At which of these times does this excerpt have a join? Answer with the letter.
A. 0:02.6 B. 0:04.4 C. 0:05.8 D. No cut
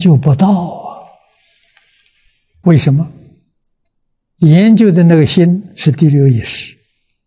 A